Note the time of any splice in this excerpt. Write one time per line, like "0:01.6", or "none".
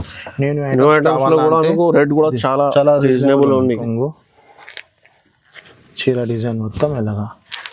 0:03.8